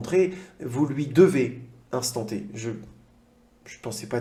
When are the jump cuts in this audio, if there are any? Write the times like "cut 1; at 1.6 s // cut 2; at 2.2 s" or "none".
none